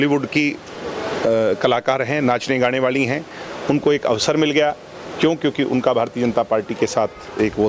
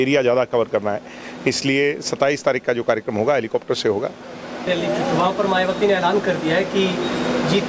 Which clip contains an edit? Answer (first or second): second